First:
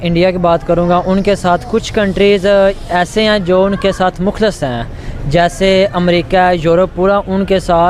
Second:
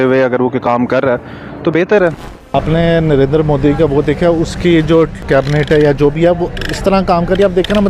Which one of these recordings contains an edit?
second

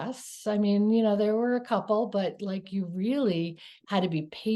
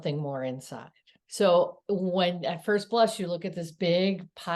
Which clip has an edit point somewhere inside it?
second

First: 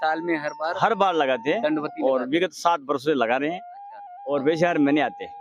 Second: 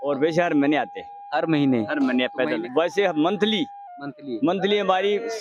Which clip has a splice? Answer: second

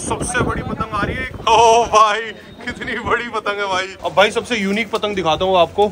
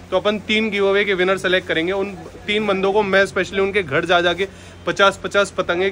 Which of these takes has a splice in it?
first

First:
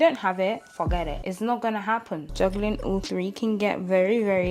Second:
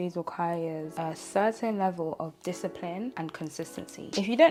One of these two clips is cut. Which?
first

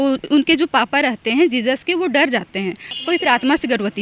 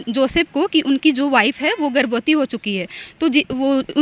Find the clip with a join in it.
first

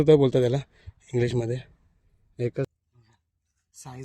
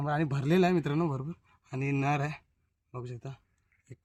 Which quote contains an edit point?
first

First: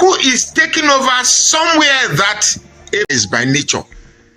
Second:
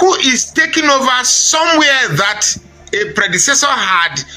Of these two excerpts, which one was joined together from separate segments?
first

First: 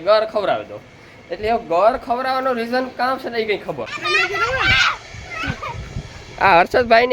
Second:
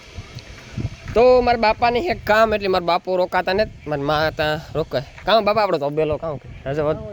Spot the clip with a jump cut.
first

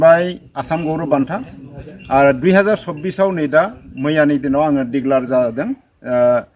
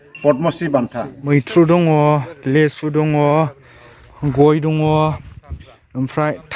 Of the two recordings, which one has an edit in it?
second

